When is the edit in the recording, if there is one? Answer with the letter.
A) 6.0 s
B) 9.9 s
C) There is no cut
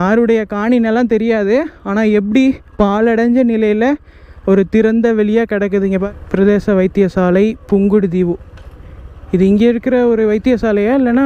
A